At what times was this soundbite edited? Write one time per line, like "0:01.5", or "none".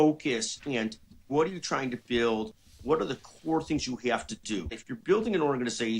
0:04.8